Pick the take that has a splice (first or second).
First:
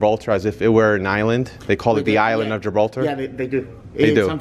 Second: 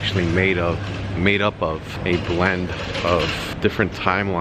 second